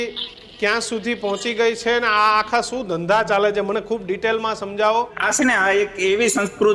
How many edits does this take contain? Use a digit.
1